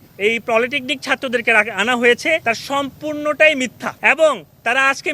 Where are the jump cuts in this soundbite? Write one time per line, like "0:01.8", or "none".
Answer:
0:02.4
0:03.8